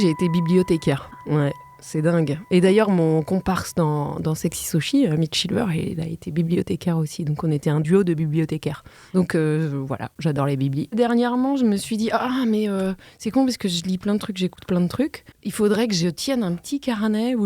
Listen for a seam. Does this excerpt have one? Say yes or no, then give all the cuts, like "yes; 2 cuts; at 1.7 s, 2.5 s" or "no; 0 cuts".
yes; 2 cuts; at 8.9 s, 10.9 s